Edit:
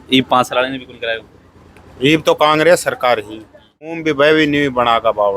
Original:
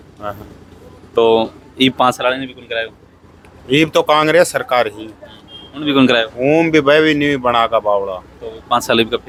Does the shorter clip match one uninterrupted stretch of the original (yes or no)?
no